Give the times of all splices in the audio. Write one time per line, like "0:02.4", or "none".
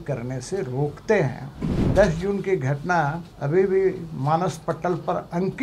0:01.9
0:03.3